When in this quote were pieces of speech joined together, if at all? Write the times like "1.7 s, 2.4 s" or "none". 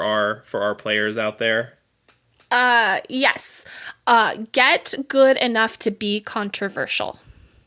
none